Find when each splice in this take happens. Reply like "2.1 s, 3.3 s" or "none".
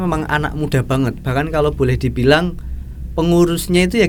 none